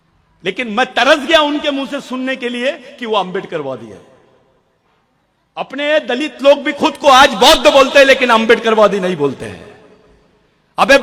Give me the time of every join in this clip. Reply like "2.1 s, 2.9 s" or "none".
none